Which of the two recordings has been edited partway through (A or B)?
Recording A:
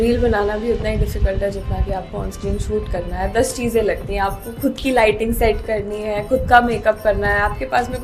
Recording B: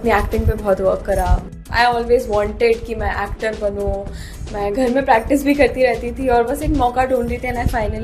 B